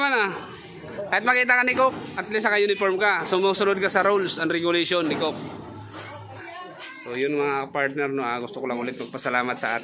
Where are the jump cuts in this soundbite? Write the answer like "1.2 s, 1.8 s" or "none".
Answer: 6.4 s